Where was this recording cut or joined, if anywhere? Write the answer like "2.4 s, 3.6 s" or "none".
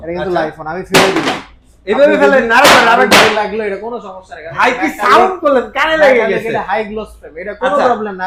none